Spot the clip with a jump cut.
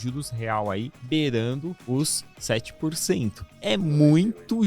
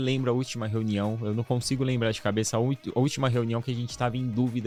first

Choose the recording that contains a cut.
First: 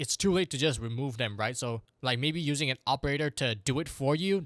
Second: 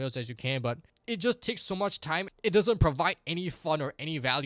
first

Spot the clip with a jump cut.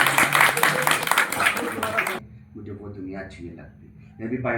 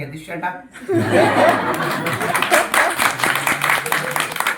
first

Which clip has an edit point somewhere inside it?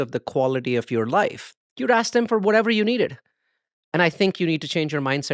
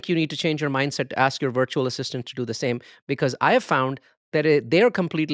first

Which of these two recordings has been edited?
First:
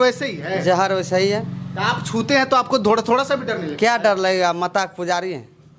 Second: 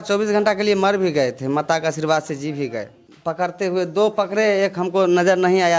second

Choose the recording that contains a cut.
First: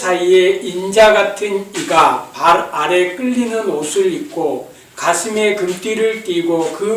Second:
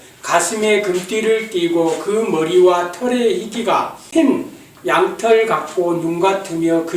second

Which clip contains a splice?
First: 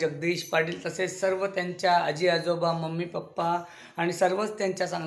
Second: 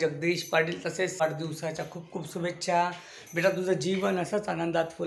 second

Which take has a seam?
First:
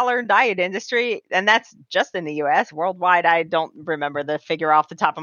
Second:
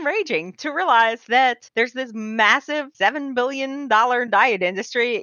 second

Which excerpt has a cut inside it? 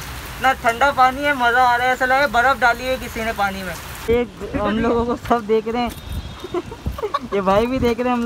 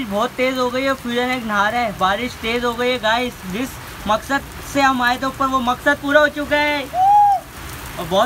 first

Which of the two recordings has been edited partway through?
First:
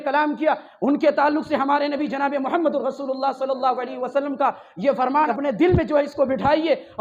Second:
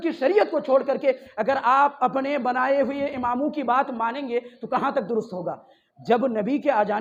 first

